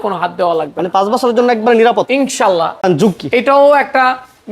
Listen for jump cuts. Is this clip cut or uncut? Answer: cut